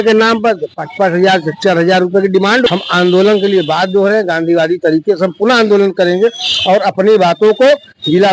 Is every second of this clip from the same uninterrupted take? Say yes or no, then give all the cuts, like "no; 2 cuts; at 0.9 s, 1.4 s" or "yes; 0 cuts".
no; 1 cut; at 2.7 s